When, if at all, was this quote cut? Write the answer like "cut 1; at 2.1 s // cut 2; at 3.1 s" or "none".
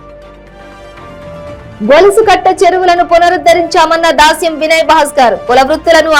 none